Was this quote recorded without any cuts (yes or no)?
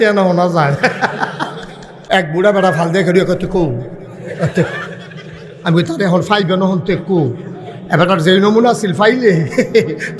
no